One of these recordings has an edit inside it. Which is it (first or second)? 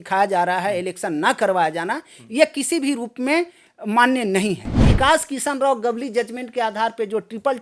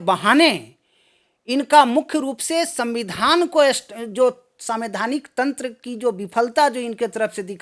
first